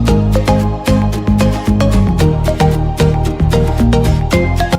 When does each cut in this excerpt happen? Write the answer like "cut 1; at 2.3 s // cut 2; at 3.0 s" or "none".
cut 1; at 3.7 s